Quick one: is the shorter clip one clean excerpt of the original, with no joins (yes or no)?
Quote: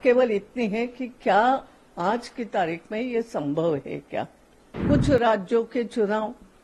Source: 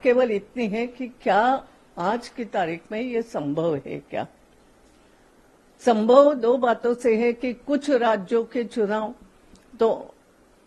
no